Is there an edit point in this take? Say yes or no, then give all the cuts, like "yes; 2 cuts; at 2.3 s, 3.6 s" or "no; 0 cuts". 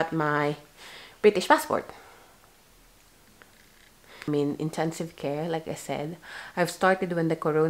yes; 1 cut; at 4.3 s